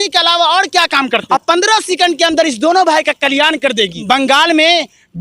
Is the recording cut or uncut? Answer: cut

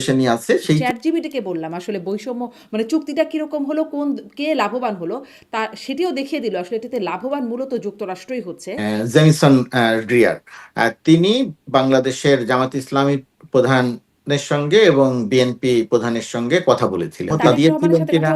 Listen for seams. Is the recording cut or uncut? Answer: cut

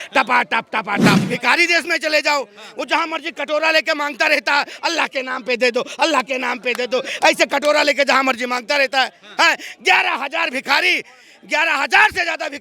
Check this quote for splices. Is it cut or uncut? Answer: cut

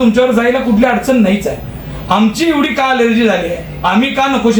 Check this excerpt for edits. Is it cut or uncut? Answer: uncut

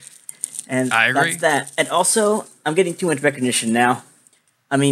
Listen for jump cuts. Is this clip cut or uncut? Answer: uncut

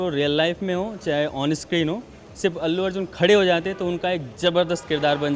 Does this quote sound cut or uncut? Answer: uncut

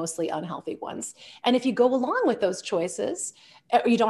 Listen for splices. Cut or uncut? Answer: uncut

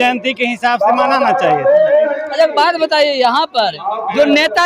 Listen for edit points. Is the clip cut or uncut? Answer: uncut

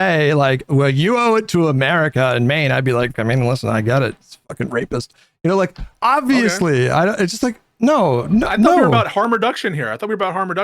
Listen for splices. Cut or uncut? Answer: cut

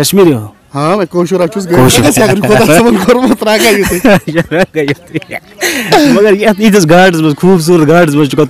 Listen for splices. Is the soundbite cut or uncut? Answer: cut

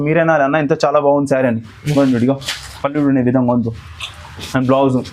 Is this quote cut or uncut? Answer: uncut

